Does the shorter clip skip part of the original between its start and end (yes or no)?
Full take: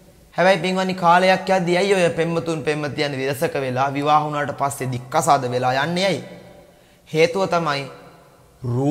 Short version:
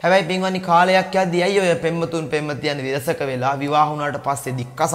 no